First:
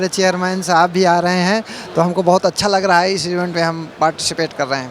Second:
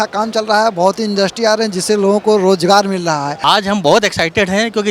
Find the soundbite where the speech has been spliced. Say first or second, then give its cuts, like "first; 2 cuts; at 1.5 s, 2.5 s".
second; 1 cut; at 3.3 s